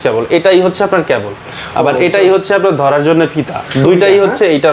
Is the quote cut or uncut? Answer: uncut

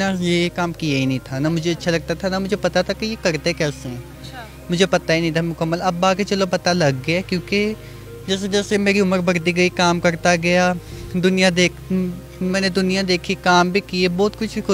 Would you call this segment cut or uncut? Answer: uncut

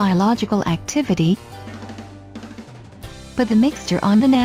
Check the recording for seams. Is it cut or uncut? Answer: uncut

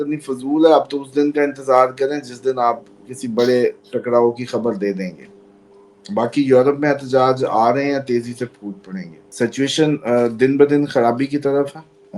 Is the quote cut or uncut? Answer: cut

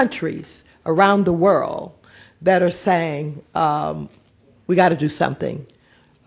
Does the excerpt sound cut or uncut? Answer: uncut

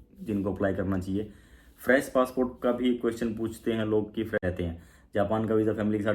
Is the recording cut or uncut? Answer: cut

